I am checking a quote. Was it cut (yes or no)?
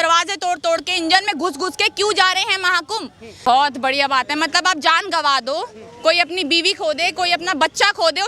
yes